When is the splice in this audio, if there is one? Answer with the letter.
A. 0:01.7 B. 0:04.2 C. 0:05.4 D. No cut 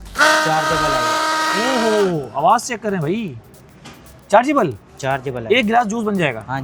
D